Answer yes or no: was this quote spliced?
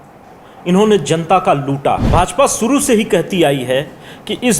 yes